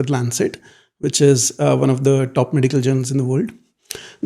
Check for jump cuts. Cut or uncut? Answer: uncut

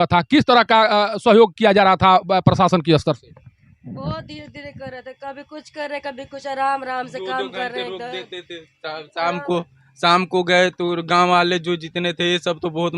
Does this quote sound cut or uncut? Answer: uncut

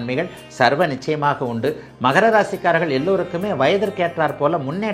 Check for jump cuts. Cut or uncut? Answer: uncut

